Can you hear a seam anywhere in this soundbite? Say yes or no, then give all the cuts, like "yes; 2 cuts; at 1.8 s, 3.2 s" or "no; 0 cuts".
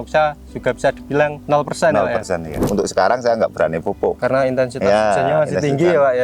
yes; 3 cuts; at 1.4 s, 2.6 s, 4.2 s